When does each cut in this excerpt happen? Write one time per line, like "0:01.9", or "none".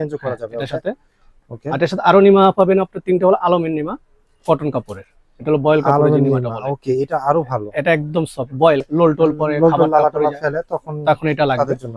0:08.9